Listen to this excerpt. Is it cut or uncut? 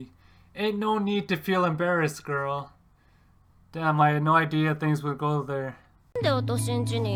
uncut